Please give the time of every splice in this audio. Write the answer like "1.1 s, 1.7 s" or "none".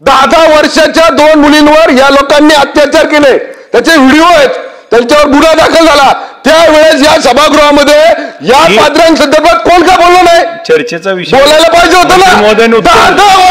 none